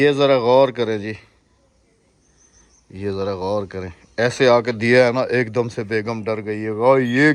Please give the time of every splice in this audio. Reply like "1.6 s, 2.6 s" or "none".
none